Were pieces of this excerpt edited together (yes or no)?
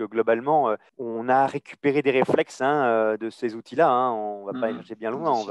yes